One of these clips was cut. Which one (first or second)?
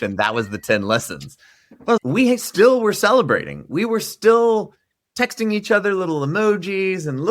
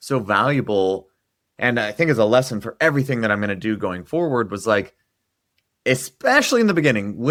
first